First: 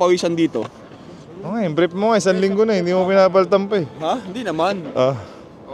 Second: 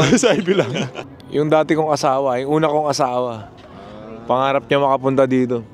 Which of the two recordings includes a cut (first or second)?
second